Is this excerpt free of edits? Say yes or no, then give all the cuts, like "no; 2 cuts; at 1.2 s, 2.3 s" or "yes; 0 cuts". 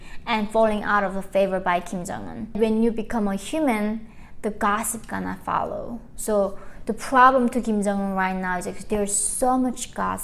no; 1 cut; at 2.6 s